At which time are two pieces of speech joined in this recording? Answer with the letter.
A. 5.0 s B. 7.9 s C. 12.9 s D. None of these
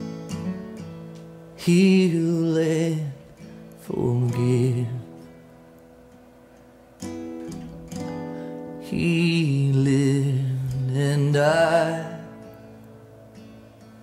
A